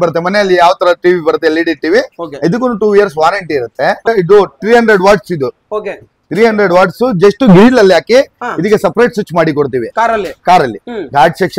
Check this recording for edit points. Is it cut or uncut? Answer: cut